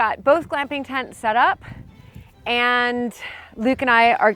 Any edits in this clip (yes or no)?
no